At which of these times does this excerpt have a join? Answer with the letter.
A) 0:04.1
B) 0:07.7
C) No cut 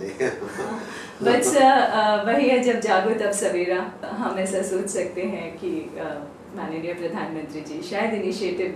A